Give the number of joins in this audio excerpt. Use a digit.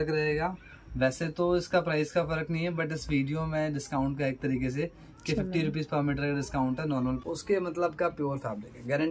1